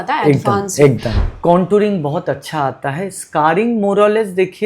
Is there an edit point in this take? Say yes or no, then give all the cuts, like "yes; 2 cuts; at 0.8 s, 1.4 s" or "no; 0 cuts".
yes; 1 cut; at 1.1 s